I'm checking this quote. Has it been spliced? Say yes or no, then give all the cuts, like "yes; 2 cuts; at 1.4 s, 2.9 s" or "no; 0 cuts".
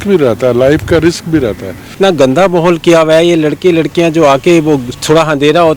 yes; 2 cuts; at 2.0 s, 4.9 s